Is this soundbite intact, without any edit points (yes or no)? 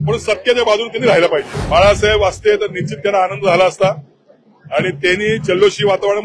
no